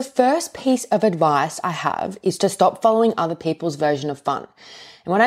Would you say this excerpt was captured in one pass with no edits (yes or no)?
yes